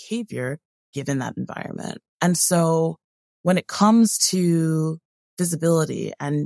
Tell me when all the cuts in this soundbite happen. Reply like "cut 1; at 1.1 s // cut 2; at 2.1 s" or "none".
cut 1; at 2.0 s